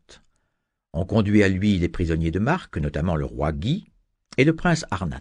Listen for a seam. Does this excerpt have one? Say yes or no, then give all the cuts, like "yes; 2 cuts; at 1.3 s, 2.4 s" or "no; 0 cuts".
yes; 1 cut; at 4.3 s